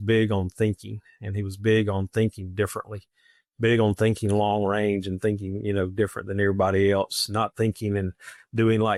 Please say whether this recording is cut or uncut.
uncut